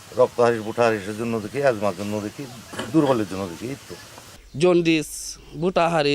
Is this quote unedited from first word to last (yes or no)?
no